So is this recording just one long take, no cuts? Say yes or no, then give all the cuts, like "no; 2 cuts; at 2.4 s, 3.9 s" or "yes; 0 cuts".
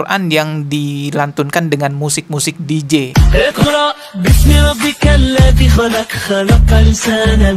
no; 1 cut; at 3.1 s